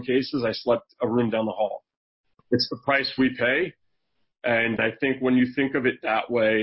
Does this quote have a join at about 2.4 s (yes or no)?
yes